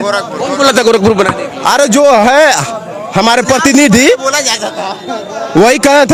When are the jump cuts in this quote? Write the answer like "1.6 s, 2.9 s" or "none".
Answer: none